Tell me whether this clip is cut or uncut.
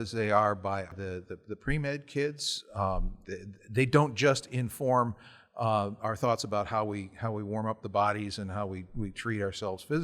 cut